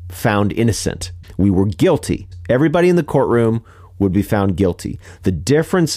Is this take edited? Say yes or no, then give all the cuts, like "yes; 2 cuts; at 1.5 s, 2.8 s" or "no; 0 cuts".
yes; 2 cuts; at 1.1 s, 2.3 s